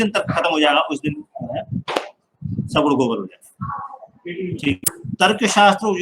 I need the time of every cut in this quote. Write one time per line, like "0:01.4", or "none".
0:04.9